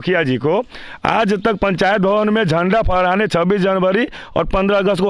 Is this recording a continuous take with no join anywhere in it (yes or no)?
yes